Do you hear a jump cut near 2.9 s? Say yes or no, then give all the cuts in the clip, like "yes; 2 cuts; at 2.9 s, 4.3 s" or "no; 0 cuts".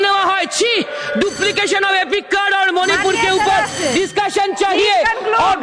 no; 0 cuts